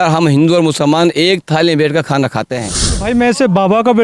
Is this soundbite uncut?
no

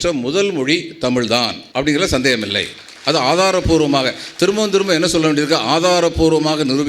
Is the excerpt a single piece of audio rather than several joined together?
no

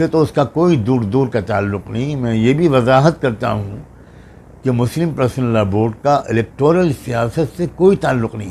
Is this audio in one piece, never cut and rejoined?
yes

